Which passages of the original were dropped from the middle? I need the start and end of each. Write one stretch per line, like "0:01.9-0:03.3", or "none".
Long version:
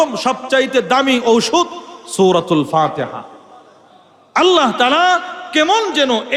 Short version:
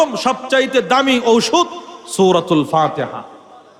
none